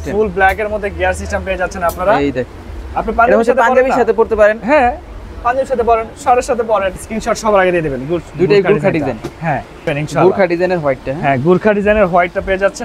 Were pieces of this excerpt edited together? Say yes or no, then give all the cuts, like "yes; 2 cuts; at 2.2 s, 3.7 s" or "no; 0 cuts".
yes; 3 cuts; at 2.5 s, 7.0 s, 9.9 s